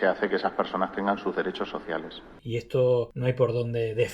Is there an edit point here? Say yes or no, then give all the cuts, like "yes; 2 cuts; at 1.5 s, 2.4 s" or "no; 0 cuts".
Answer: yes; 2 cuts; at 2.2 s, 3.1 s